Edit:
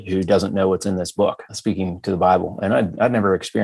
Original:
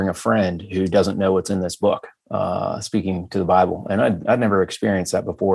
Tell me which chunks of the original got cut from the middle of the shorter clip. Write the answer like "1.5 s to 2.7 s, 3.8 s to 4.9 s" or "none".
2.2 s to 2.8 s